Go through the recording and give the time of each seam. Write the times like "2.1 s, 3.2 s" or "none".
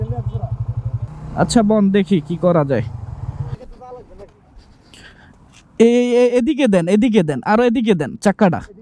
1.0 s, 3.6 s